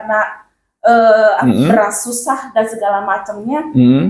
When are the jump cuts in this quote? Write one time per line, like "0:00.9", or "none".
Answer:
0:01.4